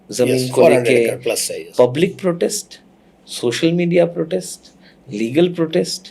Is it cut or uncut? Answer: cut